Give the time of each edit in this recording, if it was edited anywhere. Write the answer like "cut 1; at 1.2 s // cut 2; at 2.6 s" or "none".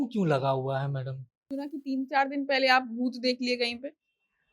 cut 1; at 1.5 s